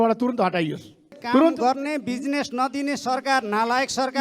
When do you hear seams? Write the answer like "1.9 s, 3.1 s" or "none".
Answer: 1.2 s

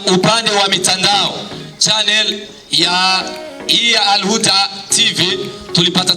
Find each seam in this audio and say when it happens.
1.6 s

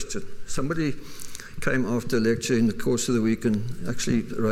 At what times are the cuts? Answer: 1.0 s

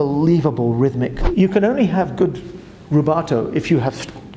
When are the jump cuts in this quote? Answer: 1.2 s

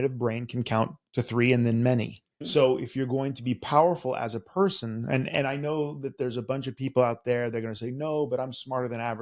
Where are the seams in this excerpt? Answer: 2.4 s

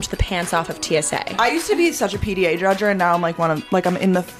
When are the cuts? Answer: 1.3 s

